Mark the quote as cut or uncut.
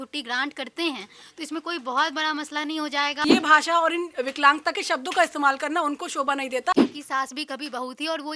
cut